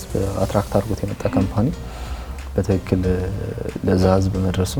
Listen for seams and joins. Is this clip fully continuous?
yes; 0 cuts

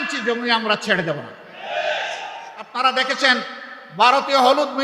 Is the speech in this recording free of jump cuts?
no; 1 cut; at 2.7 s

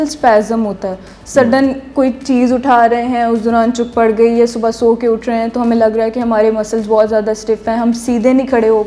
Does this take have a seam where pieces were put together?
no; 0 cuts

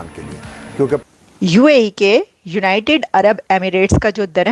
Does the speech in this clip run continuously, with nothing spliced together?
no; 1 cut; at 1.0 s

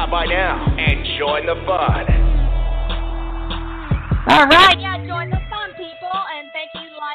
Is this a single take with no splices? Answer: yes; 0 cuts

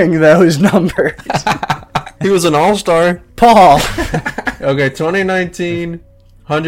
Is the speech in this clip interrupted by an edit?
yes; 3 cuts; at 2.1 s, 3.3 s, 4.6 s

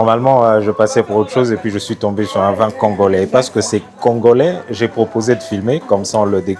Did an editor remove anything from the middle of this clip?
no; 0 cuts

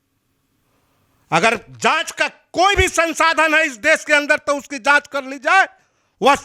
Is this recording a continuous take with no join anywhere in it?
yes; 0 cuts

